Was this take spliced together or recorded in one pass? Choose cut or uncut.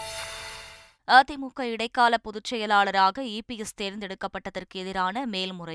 cut